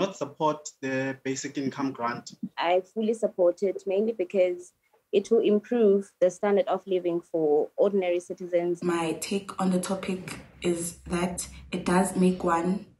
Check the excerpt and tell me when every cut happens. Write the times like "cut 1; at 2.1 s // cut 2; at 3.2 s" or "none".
cut 1; at 2.5 s // cut 2; at 8.8 s